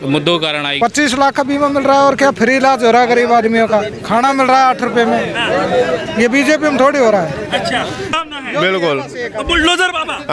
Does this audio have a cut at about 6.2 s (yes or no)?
no